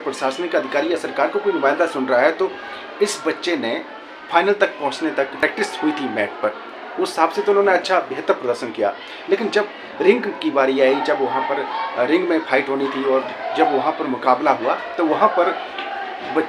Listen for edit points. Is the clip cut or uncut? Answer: uncut